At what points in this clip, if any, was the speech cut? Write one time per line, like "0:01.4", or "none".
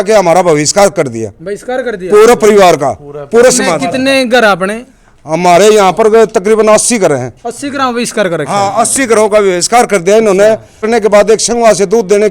0:10.8